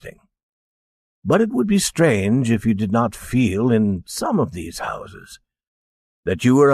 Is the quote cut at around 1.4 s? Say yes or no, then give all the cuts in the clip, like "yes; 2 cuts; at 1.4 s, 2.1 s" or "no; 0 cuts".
yes; 1 cut; at 1.4 s